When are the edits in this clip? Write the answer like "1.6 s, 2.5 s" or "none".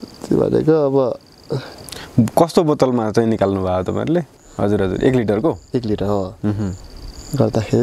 4.4 s

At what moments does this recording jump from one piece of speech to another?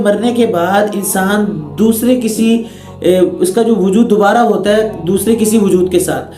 none

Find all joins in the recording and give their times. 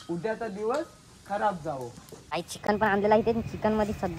2.3 s

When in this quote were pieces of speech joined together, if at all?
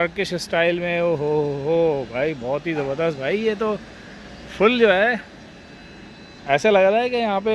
none

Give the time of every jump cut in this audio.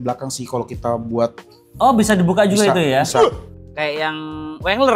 3.6 s

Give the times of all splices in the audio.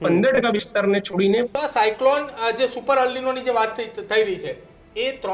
1.5 s

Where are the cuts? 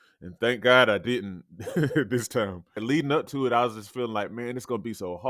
2.8 s

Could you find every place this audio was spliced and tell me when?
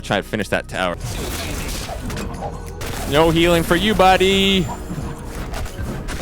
0.9 s

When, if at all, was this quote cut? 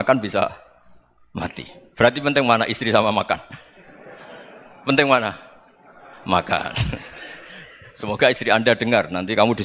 none

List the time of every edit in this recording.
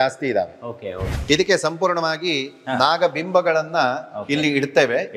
1.1 s

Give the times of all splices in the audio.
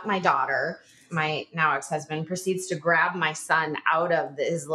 1.0 s

